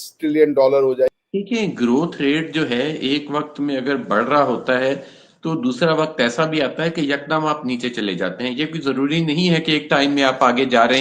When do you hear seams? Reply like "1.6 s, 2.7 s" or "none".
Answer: 1.1 s